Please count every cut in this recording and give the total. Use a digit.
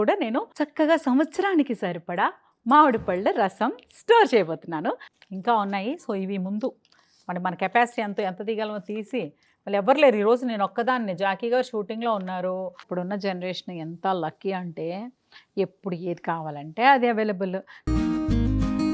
3